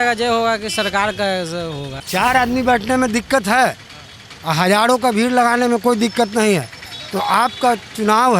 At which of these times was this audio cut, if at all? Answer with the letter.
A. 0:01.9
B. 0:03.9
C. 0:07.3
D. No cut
A